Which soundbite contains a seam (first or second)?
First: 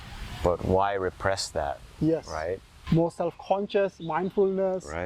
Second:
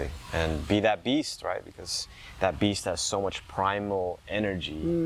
first